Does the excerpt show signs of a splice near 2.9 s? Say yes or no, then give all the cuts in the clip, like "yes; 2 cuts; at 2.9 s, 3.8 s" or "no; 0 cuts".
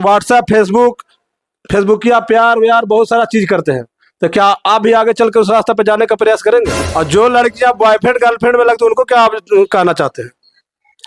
no; 1 cut; at 6.8 s